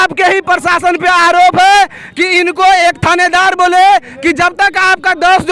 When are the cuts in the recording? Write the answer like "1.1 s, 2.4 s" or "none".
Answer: none